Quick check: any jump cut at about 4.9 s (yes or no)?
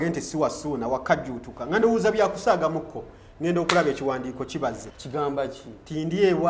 yes